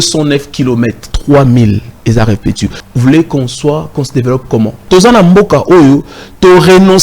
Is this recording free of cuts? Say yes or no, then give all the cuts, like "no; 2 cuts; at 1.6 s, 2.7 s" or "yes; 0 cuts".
no; 3 cuts; at 1.1 s, 2.8 s, 4.8 s